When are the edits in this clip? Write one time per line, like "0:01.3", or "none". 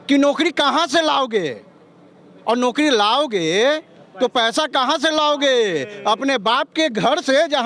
none